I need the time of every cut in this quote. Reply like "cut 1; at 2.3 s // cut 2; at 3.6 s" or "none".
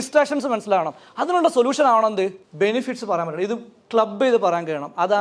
cut 1; at 2.4 s

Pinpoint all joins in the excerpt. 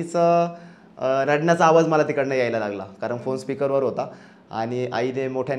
none

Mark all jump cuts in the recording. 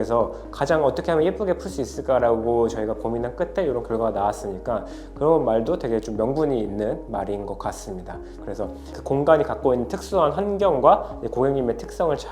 cut 1; at 8.3 s

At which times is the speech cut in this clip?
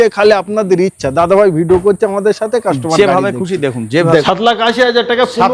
cut 1; at 4.2 s

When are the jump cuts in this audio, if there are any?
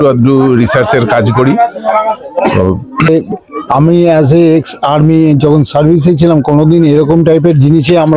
cut 1; at 3.1 s

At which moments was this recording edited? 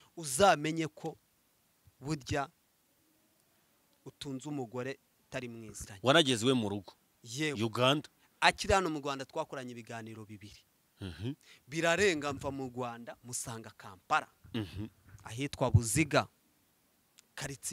cut 1; at 5.8 s

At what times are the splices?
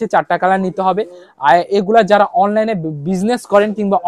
none

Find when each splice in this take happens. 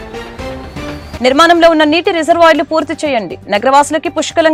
none

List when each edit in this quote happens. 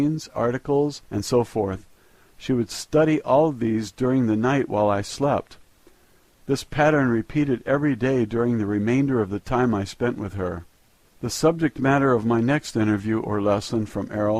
none

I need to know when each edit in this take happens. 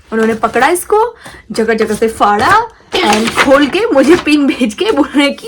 none

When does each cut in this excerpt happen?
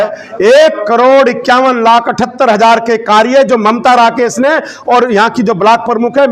none

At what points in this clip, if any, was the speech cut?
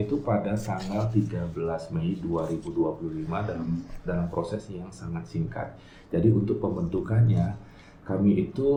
none

